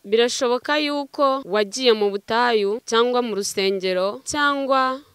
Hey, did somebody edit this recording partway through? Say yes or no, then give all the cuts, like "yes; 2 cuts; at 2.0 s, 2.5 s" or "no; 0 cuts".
yes; 3 cuts; at 1.4 s, 2.8 s, 4.2 s